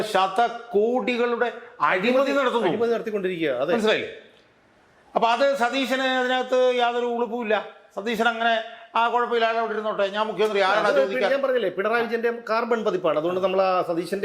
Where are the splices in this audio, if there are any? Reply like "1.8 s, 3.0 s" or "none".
none